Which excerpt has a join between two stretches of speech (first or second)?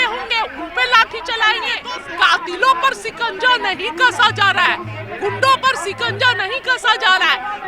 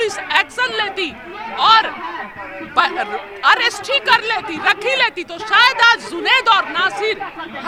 first